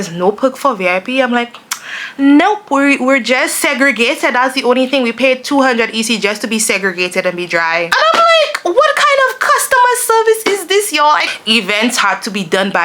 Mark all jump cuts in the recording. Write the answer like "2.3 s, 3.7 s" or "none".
7.9 s, 11.4 s